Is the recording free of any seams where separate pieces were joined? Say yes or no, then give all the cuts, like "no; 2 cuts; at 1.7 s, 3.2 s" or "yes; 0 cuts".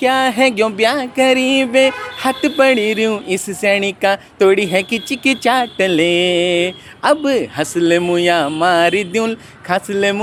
yes; 0 cuts